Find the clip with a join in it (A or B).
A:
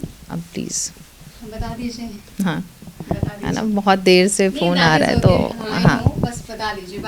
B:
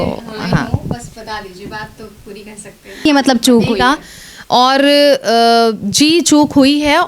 B